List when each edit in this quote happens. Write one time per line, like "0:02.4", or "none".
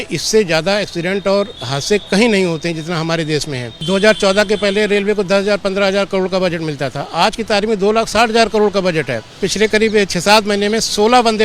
0:03.8
0:09.4